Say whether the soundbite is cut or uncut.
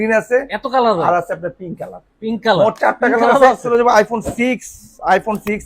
cut